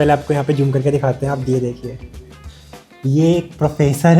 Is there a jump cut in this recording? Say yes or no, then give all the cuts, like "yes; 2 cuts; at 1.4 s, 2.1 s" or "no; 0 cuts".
no; 0 cuts